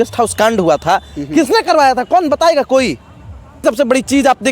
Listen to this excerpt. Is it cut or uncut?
cut